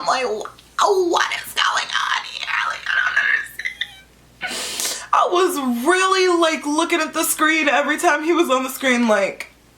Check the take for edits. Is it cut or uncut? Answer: cut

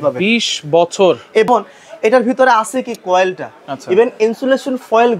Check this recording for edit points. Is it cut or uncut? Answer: cut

